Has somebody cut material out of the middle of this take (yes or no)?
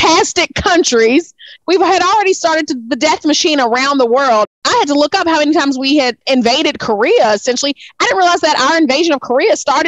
yes